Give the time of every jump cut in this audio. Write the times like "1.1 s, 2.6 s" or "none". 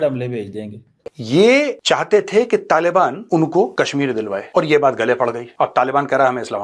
1.1 s